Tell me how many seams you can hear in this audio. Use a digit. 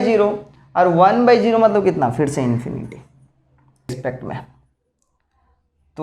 1